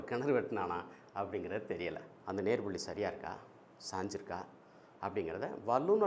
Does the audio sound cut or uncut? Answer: cut